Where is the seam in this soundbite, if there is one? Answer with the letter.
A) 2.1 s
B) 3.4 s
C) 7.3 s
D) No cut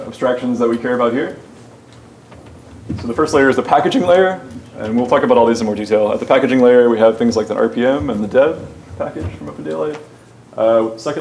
B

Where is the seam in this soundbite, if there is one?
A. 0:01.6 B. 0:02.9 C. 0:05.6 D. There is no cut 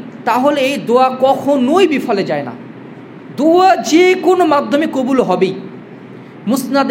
D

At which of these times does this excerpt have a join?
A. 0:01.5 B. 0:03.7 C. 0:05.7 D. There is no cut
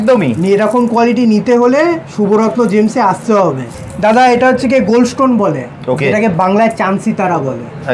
B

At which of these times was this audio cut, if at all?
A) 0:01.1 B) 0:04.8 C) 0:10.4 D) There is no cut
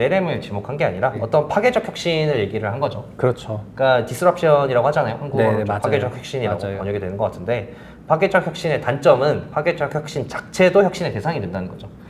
A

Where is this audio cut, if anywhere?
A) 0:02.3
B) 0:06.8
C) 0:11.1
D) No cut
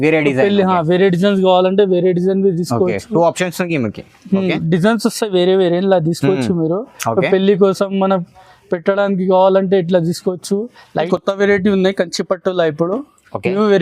C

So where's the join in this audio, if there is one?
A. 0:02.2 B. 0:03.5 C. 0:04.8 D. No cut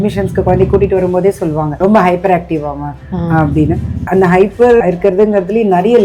C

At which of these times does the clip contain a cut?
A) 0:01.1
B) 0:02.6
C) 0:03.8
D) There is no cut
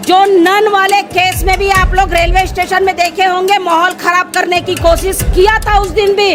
D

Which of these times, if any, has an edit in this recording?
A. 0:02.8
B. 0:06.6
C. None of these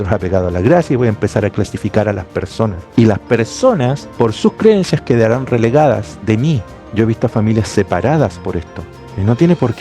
A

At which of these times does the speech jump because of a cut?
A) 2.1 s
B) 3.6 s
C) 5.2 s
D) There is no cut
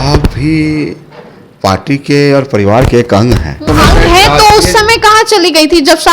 B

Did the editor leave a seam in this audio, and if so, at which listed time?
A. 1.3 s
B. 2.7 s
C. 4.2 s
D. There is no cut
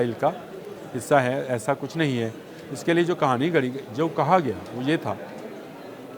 D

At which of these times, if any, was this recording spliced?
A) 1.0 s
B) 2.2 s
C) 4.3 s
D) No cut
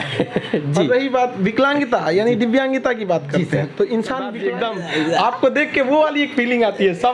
C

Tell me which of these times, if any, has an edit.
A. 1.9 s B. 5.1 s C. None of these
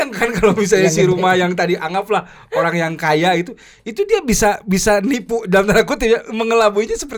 C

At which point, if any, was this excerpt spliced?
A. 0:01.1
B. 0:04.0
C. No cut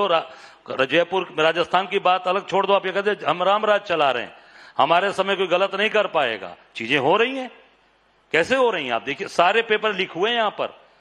A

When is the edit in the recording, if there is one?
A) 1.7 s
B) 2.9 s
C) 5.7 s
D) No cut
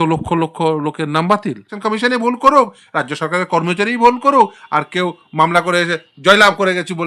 A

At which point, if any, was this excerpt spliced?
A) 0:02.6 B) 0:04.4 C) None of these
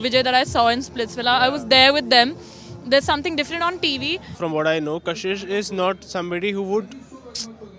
B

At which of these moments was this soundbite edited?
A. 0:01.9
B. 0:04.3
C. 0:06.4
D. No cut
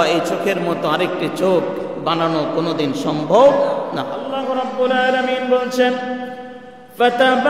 B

